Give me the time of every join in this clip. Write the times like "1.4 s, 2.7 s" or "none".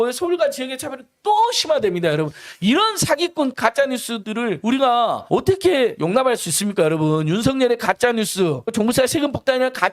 8.7 s